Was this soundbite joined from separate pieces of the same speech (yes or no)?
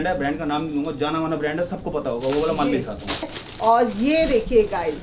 yes